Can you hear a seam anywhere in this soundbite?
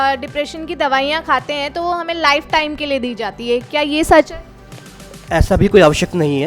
no; 0 cuts

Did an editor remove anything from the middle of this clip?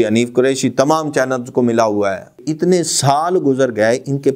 yes; 1 cut; at 2.3 s

